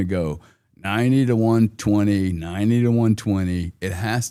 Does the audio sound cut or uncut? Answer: uncut